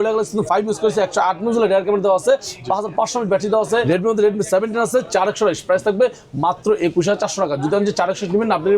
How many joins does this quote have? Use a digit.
1